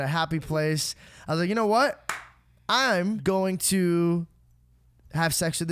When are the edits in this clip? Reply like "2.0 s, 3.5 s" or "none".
3.2 s

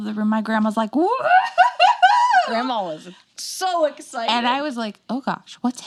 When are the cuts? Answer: none

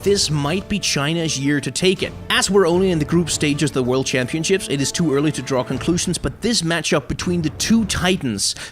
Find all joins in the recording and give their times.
4.2 s

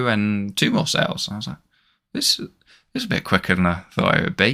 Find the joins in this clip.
none

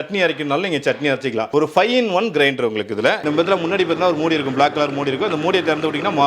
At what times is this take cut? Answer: 1.5 s, 3.2 s

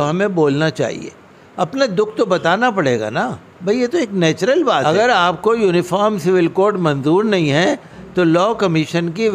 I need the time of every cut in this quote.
4.8 s

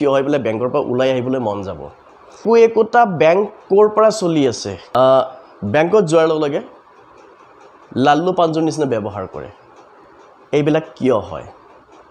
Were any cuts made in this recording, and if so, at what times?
2.4 s, 4.7 s

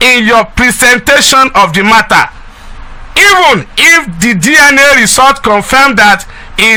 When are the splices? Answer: none

